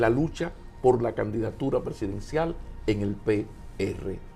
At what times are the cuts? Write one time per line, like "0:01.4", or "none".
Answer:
none